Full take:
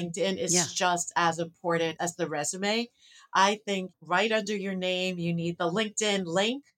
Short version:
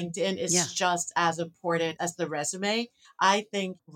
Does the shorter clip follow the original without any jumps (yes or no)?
no